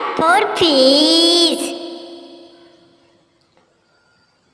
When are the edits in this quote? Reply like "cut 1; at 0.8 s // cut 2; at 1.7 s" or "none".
none